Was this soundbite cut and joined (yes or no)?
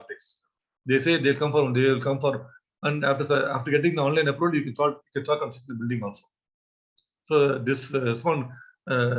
no